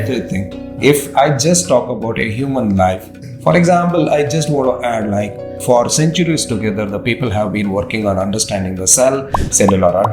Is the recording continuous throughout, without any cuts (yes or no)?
no